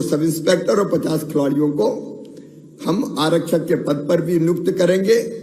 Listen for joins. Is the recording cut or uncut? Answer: uncut